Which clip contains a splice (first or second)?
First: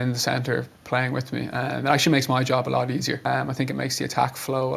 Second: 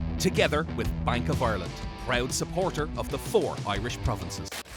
first